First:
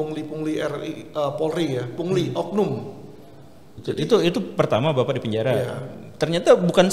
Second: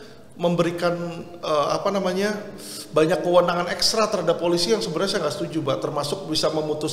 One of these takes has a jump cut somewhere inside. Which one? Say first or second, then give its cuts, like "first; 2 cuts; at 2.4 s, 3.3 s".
first; 1 cut; at 3.8 s